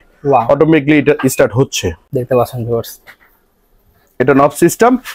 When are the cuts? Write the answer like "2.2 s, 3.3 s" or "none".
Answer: none

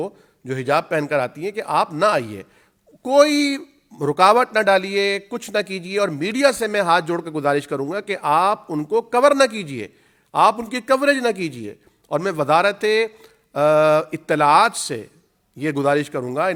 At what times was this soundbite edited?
none

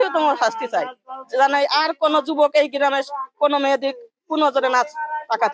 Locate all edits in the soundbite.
none

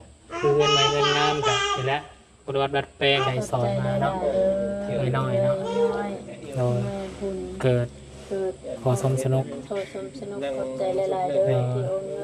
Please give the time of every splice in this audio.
3.3 s

